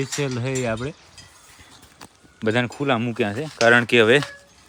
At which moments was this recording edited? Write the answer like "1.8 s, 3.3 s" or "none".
none